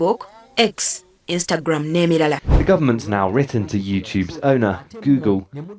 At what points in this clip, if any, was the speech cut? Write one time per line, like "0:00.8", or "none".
0:02.5

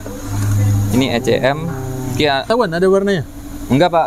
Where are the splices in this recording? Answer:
0:02.5

